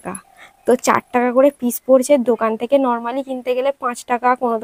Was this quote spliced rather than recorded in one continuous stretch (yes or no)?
no